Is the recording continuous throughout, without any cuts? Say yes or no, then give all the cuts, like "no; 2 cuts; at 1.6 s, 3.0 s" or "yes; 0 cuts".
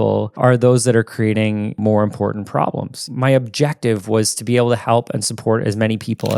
no; 2 cuts; at 1.8 s, 3.1 s